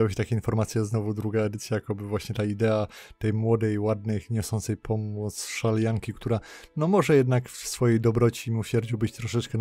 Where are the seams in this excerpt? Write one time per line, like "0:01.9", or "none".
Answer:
none